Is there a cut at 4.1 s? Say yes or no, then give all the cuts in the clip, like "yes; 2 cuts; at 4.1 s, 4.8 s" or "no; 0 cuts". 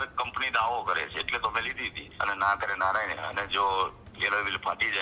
no; 1 cut; at 2.1 s